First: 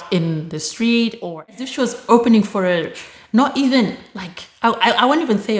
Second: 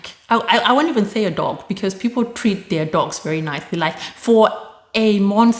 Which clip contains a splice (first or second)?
first